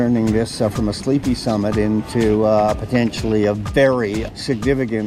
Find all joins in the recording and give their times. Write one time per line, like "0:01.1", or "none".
none